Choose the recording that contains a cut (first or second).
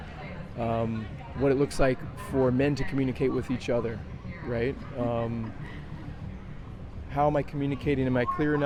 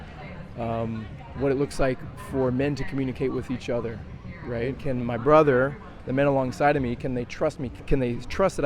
second